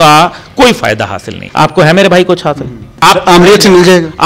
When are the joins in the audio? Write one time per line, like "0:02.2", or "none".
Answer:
0:01.4
0:03.0